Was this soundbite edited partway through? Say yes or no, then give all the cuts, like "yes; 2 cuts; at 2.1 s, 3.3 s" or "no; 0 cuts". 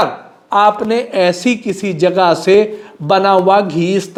no; 0 cuts